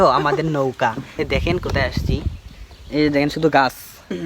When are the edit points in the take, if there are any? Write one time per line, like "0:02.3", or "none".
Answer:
0:01.1